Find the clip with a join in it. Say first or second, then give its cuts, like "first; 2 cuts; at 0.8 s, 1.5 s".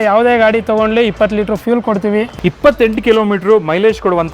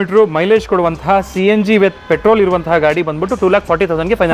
first; 1 cut; at 2.3 s